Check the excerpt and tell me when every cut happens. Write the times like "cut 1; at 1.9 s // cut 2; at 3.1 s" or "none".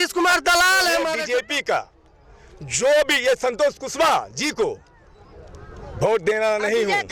cut 1; at 1.1 s